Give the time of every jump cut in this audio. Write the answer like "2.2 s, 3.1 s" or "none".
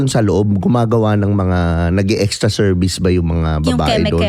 none

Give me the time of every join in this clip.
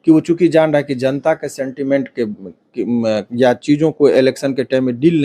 none

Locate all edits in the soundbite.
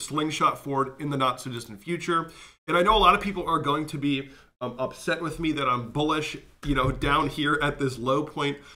none

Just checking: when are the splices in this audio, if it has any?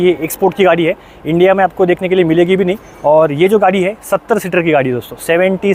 none

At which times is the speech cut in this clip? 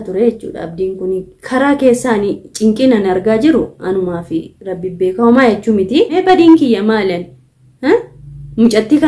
6.2 s

